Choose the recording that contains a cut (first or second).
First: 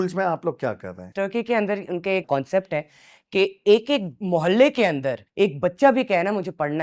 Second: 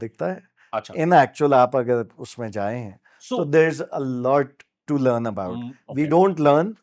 first